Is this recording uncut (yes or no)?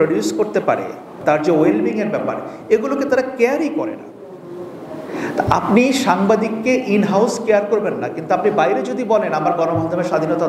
no